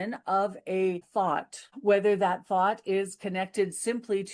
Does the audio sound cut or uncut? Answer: cut